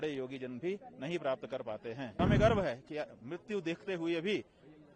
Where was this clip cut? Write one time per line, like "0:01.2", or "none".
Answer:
0:02.2